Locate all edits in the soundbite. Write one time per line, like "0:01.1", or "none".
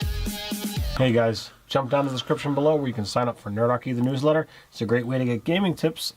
0:00.8
0:04.2